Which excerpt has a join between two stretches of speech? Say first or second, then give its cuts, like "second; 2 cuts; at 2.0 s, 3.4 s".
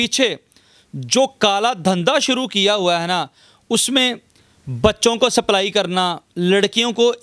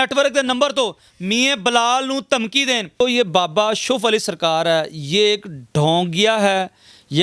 second; 1 cut; at 3.0 s